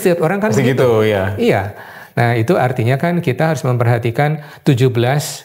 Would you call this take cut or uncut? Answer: uncut